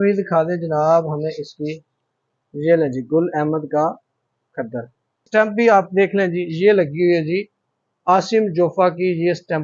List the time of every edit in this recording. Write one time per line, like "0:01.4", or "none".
0:05.3